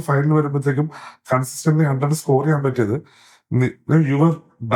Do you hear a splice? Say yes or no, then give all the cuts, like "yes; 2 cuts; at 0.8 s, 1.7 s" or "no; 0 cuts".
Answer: no; 0 cuts